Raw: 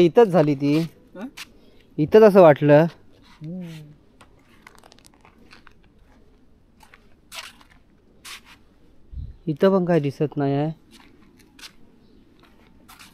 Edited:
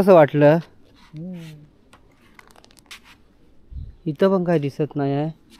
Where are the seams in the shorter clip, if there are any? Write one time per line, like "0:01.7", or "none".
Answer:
0:02.9